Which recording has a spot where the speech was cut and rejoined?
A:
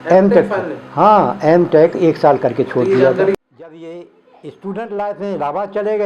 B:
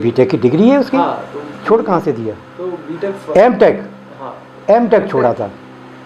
A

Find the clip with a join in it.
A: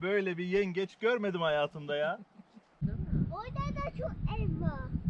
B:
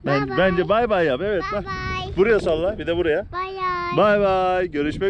A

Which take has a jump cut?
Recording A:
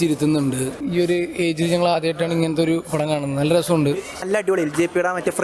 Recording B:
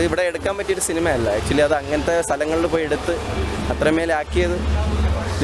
A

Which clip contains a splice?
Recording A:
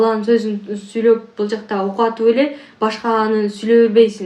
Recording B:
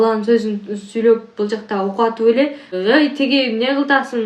B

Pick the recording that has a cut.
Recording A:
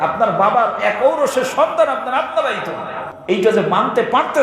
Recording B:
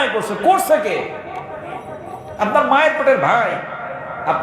A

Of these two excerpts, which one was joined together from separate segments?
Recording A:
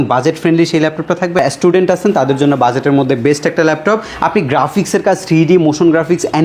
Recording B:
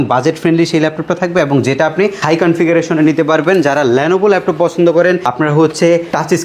A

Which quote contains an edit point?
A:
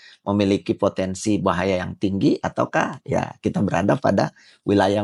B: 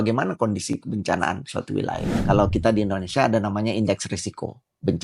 B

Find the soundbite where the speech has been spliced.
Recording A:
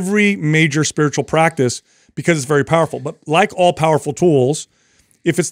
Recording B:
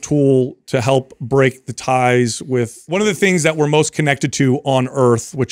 B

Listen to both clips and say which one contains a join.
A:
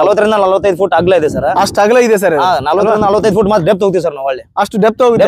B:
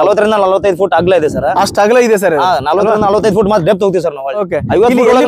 B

